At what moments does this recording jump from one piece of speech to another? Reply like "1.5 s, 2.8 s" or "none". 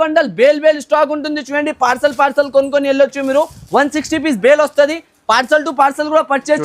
none